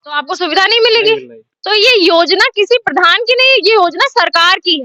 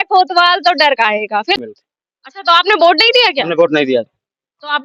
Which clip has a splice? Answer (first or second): second